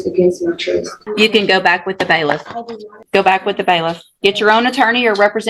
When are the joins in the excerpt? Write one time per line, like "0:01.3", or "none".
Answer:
0:01.0
0:03.0